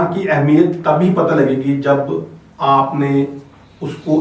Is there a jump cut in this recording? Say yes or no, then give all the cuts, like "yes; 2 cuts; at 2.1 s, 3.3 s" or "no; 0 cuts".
no; 0 cuts